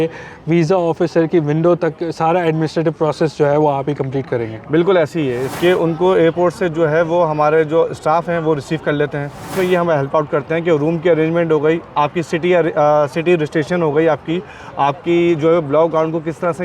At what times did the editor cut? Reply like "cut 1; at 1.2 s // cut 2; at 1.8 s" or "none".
cut 1; at 5.5 s // cut 2; at 9.5 s

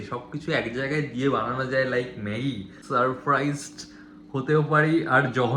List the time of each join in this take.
cut 1; at 2.7 s

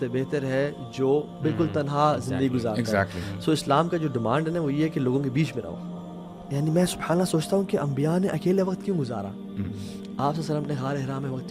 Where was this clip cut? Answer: cut 1; at 5.8 s

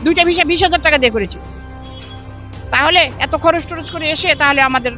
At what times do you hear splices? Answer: none

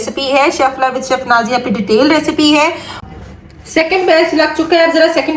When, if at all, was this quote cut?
cut 1; at 3.0 s

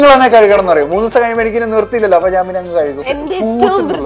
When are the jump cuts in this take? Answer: cut 1; at 3.0 s

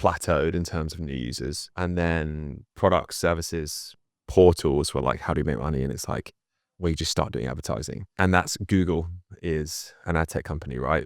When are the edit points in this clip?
cut 1; at 1.7 s // cut 2; at 8.1 s

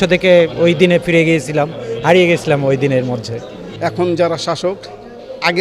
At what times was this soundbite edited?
cut 1; at 3.7 s

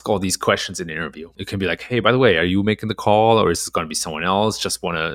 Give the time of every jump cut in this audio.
cut 1; at 1.3 s

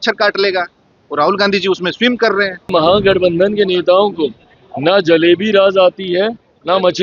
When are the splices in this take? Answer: cut 1; at 2.7 s

